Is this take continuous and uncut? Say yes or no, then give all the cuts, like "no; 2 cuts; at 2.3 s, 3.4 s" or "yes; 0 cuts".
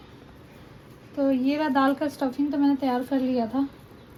yes; 0 cuts